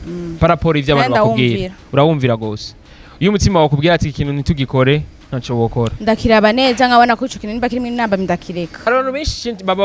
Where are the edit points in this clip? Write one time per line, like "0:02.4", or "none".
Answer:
0:08.7